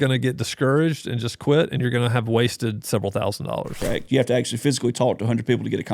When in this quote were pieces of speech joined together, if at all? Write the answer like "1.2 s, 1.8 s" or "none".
3.8 s